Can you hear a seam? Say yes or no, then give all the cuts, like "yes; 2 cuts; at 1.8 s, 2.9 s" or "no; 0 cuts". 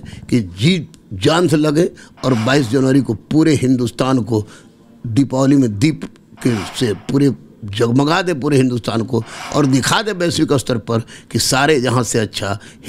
no; 0 cuts